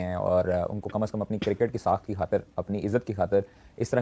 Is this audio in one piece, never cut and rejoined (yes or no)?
yes